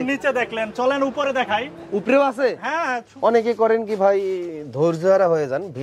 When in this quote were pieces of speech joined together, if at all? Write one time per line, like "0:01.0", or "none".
0:03.1